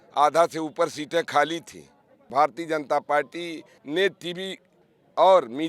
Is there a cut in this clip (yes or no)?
yes